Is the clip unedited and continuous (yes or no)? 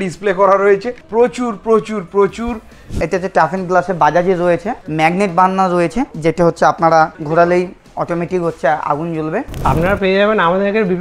no